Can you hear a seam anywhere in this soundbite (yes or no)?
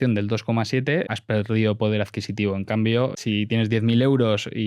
yes